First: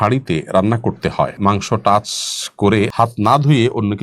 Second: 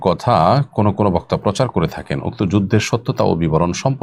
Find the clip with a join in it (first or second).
first